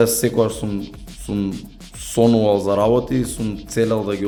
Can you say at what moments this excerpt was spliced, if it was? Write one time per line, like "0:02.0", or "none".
none